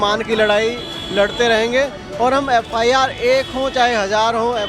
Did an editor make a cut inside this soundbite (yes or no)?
no